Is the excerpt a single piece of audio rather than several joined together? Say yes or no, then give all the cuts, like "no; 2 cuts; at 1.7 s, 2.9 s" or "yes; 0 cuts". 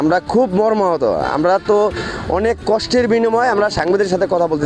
yes; 0 cuts